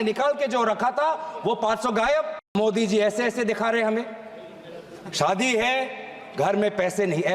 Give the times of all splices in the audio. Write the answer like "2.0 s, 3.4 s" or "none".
2.5 s